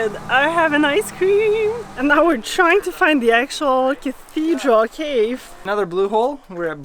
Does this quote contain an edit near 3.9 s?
no; 2 cuts; at 1.9 s, 5.6 s

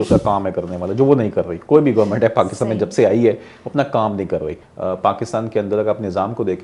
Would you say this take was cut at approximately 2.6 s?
no; 1 cut; at 4.6 s

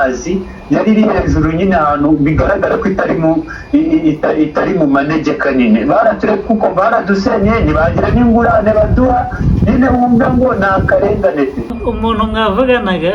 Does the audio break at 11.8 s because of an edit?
yes; 1 cut; at 11.8 s

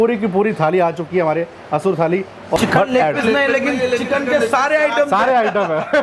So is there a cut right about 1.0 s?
no; 1 cut; at 2.6 s

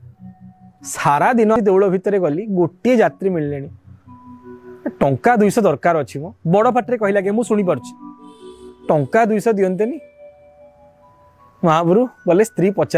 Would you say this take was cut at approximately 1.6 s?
yes; 1 cut; at 1.6 s

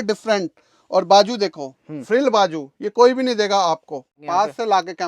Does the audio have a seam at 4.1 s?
yes; 1 cut; at 4.1 s

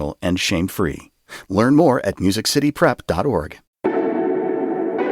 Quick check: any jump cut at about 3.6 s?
yes; 1 cut; at 3.6 s

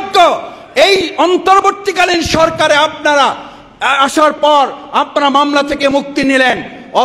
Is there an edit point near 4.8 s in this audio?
no; 0 cuts

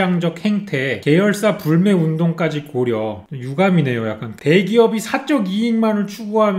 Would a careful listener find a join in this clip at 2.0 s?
no; 2 cuts; at 3.3 s, 4.3 s

